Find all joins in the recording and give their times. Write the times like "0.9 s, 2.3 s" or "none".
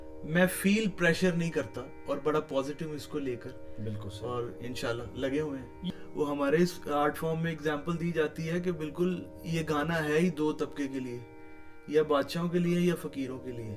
5.8 s